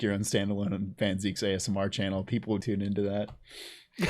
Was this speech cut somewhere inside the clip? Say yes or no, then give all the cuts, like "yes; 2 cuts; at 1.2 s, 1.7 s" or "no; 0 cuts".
yes; 1 cut; at 2.6 s